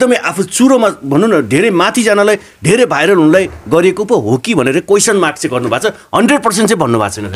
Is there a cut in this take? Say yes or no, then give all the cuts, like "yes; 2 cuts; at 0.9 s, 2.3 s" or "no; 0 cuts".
no; 0 cuts